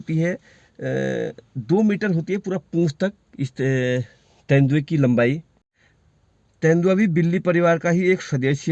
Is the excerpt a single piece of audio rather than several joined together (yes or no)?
yes